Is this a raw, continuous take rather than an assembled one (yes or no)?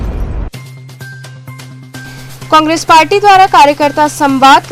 yes